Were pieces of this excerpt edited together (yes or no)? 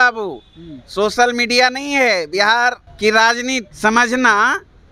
yes